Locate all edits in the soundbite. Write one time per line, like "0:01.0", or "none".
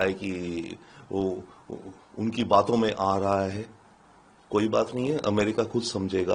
none